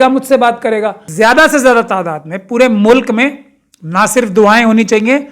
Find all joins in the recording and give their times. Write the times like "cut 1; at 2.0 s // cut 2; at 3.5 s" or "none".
cut 1; at 1.0 s